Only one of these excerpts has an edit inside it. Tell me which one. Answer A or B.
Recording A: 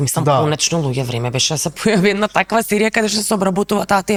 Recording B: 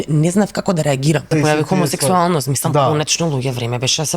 B